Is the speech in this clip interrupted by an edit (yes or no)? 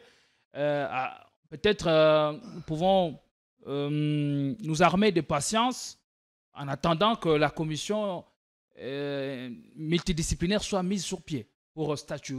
no